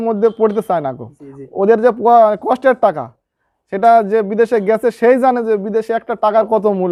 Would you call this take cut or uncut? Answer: uncut